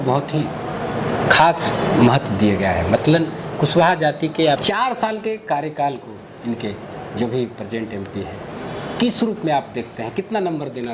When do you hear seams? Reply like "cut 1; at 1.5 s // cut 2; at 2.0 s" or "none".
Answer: cut 1; at 4.6 s